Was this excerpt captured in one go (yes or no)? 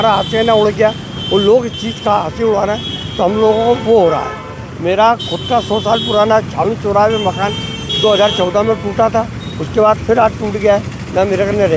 yes